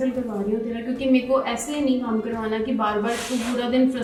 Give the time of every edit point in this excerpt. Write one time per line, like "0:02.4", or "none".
none